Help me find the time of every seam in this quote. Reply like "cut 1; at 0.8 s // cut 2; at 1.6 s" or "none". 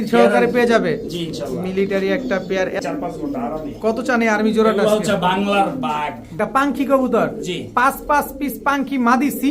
cut 1; at 2.8 s // cut 2; at 6.4 s